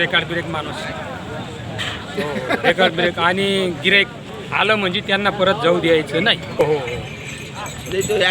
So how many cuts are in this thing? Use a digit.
1